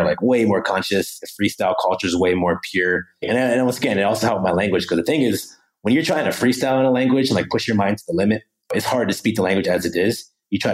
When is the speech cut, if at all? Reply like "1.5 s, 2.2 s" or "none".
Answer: 3.2 s